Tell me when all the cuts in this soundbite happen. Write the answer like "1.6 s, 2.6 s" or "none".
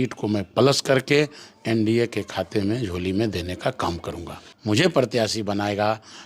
4.3 s